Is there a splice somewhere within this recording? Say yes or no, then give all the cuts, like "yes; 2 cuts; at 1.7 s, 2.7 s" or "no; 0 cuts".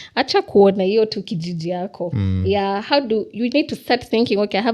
no; 0 cuts